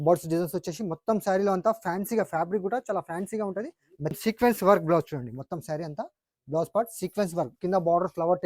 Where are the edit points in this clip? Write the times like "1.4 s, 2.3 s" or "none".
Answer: 4.2 s, 7.5 s